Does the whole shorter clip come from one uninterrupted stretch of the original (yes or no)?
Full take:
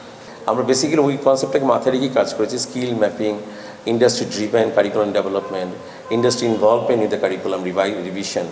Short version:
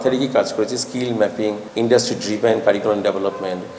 no